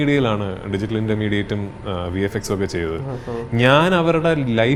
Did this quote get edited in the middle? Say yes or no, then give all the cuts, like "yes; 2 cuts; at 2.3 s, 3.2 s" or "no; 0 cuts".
no; 0 cuts